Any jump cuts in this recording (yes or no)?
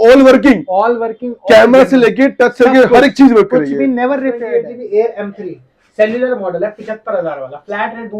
yes